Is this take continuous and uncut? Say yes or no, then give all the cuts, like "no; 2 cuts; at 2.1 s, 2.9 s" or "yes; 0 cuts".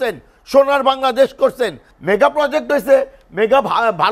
no; 1 cut; at 1.9 s